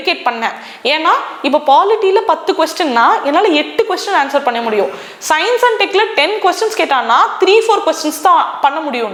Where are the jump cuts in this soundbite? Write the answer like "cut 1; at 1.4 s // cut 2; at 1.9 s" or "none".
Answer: none